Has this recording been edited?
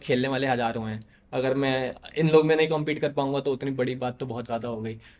no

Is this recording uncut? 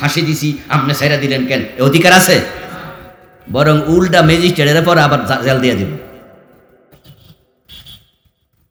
yes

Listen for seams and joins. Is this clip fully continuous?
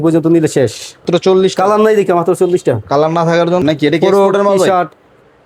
no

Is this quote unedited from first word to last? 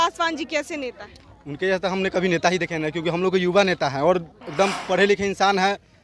no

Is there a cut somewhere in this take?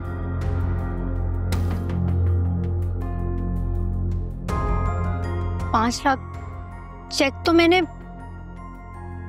no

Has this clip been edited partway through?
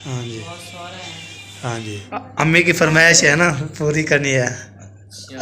yes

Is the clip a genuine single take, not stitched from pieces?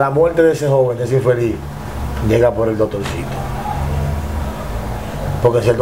yes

